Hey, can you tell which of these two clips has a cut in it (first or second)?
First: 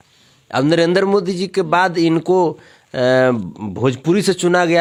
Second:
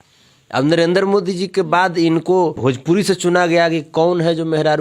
second